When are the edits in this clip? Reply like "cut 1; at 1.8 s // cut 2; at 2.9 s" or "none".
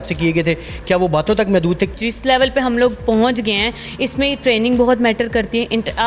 cut 1; at 1.9 s